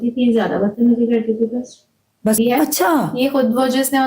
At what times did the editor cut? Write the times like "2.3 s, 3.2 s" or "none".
2.4 s